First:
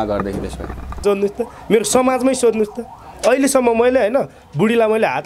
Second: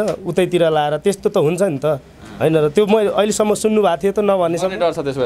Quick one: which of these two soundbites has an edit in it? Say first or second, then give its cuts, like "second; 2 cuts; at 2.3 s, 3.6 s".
first; 1 cut; at 1.0 s